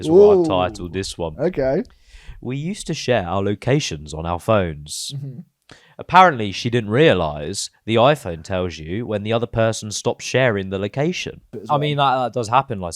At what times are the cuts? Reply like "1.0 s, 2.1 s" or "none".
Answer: 11.6 s